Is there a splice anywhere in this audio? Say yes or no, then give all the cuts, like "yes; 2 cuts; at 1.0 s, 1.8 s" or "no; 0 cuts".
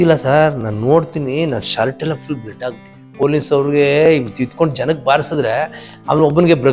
yes; 1 cut; at 3.1 s